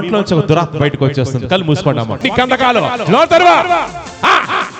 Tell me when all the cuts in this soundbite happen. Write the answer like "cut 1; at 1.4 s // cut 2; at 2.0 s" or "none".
cut 1; at 2.2 s